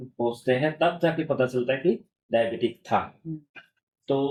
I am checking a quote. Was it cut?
no; 0 cuts

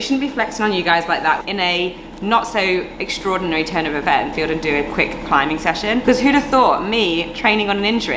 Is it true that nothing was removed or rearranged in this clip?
no; 2 cuts; at 1.4 s, 4.3 s

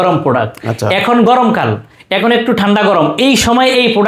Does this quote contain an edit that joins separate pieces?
no; 0 cuts

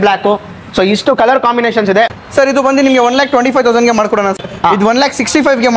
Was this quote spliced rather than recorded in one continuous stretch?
yes; 2 cuts; at 2.1 s, 4.4 s

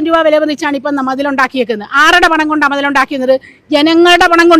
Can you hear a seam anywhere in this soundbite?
no; 0 cuts

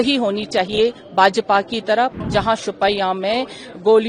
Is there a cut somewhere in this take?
yes; 1 cut; at 2.1 s

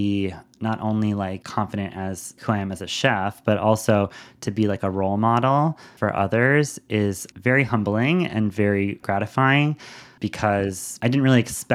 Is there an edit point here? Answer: yes; 3 cuts; at 1.4 s, 2.4 s, 5.9 s

